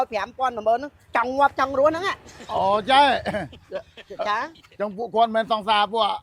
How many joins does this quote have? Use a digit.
0